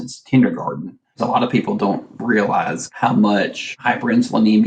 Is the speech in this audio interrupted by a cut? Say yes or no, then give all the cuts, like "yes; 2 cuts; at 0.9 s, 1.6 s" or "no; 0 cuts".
yes; 3 cuts; at 1.1 s, 2.8 s, 3.7 s